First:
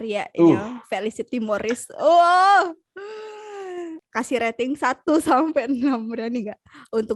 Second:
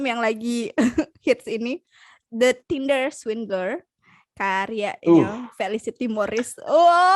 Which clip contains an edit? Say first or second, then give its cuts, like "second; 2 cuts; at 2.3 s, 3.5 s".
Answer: first; 1 cut; at 4.0 s